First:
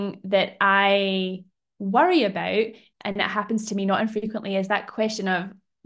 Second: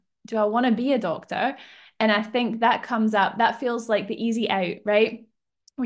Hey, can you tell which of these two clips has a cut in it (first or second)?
first